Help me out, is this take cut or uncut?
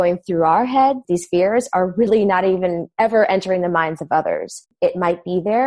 cut